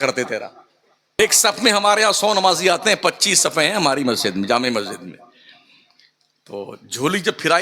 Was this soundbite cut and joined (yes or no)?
yes